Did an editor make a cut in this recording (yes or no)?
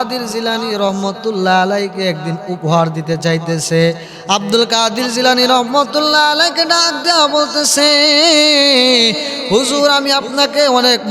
no